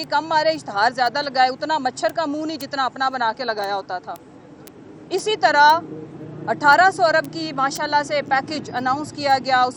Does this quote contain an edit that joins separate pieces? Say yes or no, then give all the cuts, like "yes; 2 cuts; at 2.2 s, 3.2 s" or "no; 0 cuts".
no; 0 cuts